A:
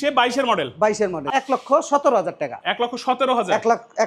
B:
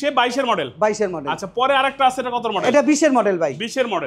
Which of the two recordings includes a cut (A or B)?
A